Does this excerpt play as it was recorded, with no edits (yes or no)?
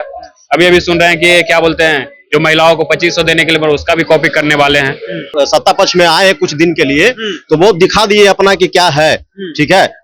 no